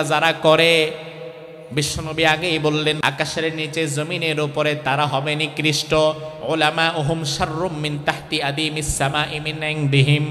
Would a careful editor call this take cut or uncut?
cut